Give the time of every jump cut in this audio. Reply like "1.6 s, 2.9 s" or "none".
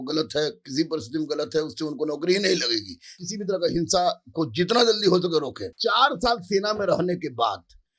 3.1 s, 5.6 s